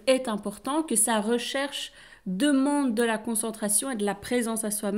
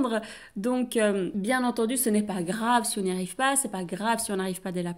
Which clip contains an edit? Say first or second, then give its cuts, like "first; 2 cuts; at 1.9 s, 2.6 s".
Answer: second; 1 cut; at 1.3 s